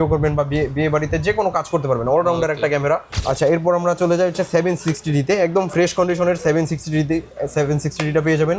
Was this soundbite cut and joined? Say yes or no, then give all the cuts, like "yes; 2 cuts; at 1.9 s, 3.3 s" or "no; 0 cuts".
yes; 1 cut; at 3.1 s